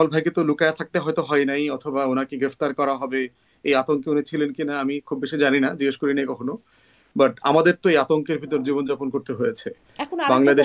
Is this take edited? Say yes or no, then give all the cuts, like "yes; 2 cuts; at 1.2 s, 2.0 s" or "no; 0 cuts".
no; 0 cuts